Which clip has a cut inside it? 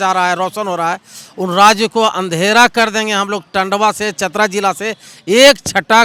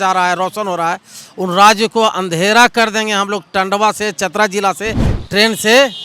second; 1 cut; at 5.1 s

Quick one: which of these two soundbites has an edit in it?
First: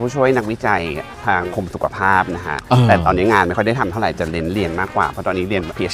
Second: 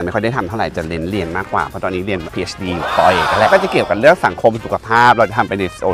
second; 1 cut; at 3.5 s

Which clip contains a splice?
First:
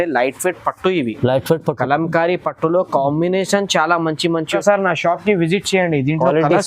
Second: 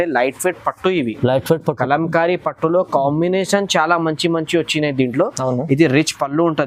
first; 1 cut; at 4.5 s

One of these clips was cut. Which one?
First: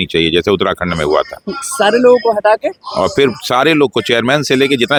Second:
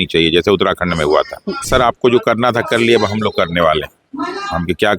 second; 1 cut; at 1.7 s

